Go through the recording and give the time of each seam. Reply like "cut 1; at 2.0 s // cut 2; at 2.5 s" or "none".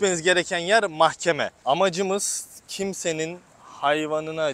cut 1; at 1.6 s